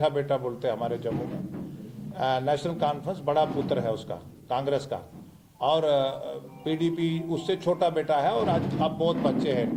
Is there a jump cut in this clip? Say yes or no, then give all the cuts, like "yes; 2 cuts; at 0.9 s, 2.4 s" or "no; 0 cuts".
no; 0 cuts